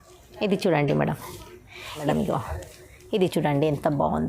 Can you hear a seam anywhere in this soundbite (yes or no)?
yes